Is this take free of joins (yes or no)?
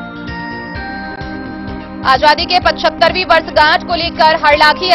no